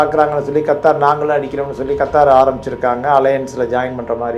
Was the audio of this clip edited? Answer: no; 0 cuts

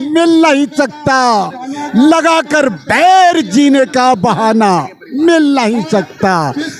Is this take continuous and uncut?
yes; 0 cuts

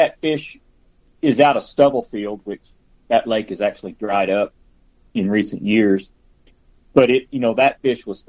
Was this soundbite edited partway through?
no; 0 cuts

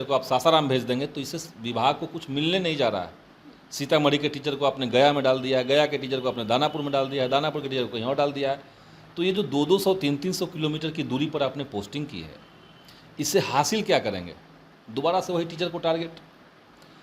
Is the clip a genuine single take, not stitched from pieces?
yes; 0 cuts

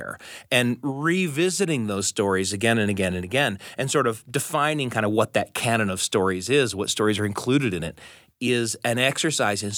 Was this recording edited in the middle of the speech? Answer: no; 0 cuts

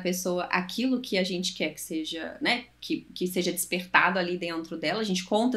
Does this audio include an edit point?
no; 0 cuts

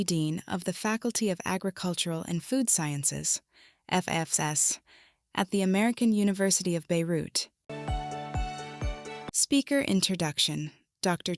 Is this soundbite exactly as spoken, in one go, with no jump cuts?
yes; 0 cuts

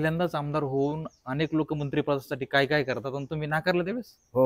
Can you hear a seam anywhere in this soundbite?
no; 0 cuts

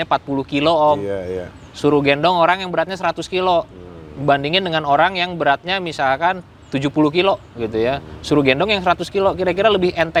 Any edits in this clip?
no; 0 cuts

